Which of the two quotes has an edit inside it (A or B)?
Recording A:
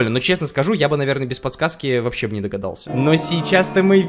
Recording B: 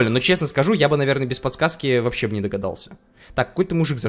A